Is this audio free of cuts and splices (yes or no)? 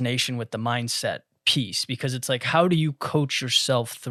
yes